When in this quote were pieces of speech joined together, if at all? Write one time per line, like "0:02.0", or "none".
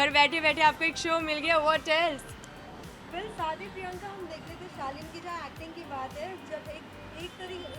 none